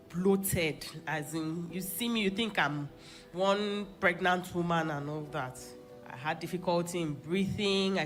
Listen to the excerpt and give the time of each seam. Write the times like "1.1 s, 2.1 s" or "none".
none